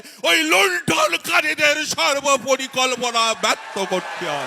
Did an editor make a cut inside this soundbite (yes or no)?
no